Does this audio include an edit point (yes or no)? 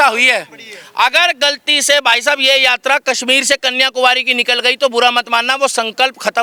no